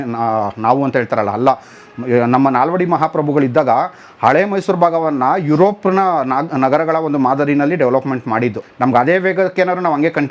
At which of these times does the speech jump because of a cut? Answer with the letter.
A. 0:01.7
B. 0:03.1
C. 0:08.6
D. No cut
C